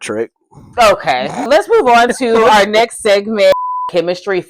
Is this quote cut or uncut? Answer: cut